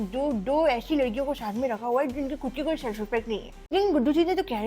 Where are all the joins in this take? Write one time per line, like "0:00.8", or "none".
0:03.7